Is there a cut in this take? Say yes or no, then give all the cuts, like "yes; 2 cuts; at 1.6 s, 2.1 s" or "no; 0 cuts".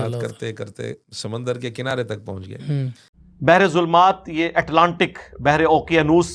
yes; 1 cut; at 1.1 s